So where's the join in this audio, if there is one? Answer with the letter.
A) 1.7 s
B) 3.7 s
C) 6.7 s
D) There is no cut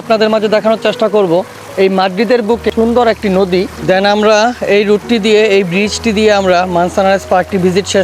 B